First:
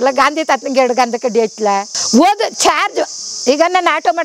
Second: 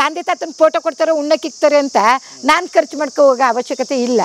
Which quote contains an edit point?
first; 1 cut; at 1.9 s

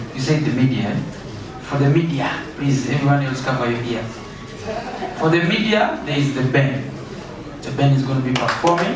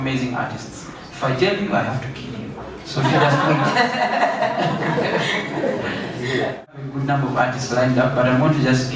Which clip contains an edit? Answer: second; 1 cut; at 6.9 s

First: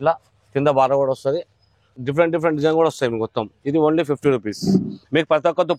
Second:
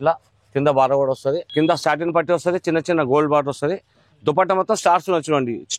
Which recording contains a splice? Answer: second; 1 cut; at 1.4 s

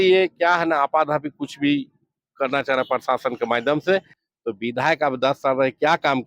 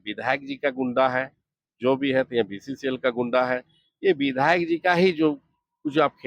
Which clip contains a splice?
first; 1 cut; at 4.2 s

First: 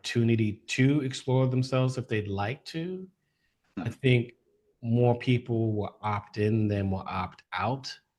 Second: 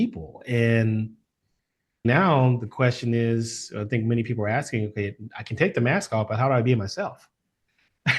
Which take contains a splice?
second; 1 cut; at 2.0 s

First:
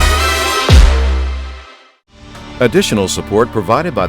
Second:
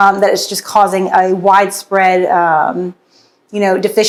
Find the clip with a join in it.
first; 1 cut; at 2.3 s

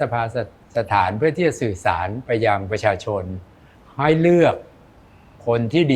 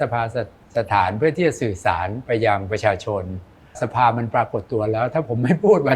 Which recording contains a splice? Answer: second; 1 cut; at 3.8 s

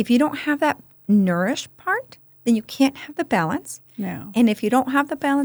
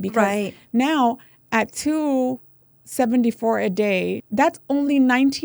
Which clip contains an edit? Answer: second; 1 cut; at 4.2 s

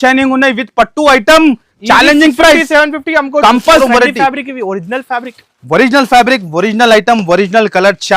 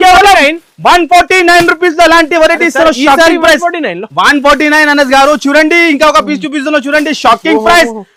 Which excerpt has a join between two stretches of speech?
first; 1 cut; at 3.8 s

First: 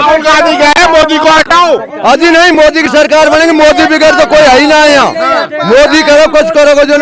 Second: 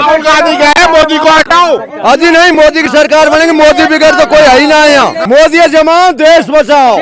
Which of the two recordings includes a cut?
second; 1 cut; at 5.2 s

